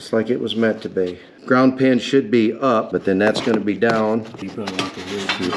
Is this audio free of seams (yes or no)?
no